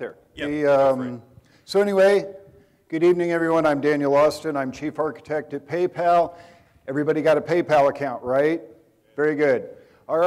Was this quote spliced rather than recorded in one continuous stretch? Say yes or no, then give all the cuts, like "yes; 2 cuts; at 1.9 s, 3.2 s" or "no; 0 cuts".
no; 0 cuts